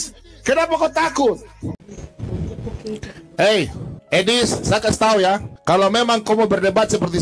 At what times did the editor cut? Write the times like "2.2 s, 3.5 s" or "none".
1.8 s